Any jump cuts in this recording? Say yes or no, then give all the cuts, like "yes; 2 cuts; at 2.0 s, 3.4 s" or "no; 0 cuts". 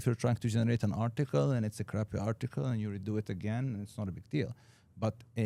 no; 0 cuts